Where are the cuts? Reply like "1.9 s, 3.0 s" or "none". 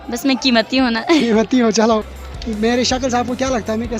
2.1 s